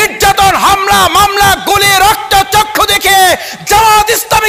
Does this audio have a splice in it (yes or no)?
no